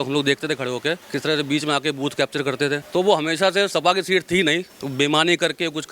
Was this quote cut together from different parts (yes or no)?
yes